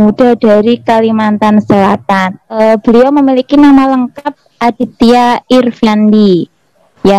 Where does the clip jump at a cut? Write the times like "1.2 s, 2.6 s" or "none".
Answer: 2.6 s